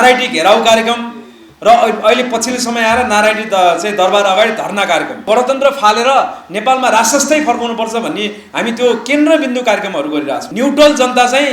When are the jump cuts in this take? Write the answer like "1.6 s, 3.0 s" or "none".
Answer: 5.2 s, 10.4 s